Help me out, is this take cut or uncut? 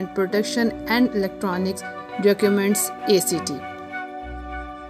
cut